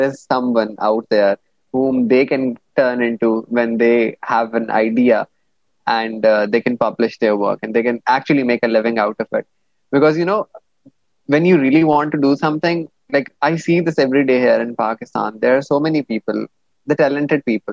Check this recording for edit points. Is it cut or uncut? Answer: uncut